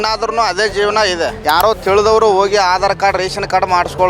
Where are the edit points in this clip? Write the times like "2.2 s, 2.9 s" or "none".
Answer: 1.4 s